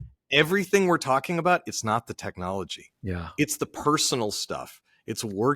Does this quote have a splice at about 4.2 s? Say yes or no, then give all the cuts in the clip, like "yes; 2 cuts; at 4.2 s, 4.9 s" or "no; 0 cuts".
no; 0 cuts